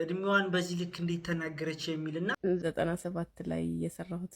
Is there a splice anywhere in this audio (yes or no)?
yes